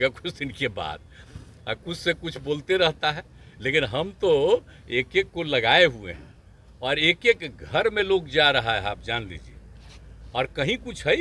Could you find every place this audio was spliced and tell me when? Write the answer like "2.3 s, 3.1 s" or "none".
none